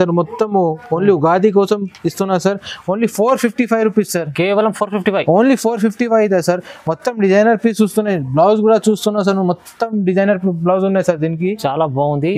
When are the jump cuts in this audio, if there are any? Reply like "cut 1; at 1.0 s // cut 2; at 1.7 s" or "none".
none